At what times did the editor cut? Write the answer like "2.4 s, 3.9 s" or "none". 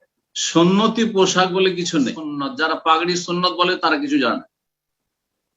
2.4 s